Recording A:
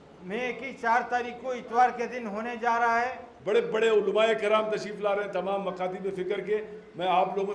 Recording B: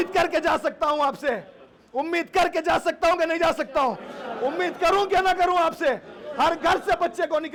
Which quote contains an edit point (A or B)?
A